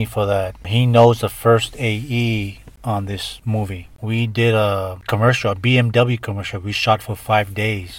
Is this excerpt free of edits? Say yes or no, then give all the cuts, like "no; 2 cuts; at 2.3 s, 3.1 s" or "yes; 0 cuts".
no; 1 cut; at 4.0 s